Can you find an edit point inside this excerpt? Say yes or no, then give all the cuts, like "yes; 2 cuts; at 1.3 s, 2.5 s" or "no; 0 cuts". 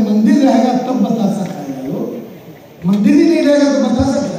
no; 0 cuts